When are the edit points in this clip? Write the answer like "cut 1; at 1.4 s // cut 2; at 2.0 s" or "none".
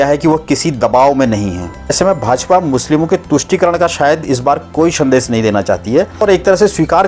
cut 1; at 1.9 s // cut 2; at 6.2 s